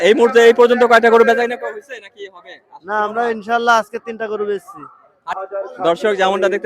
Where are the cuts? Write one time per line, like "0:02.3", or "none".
0:05.4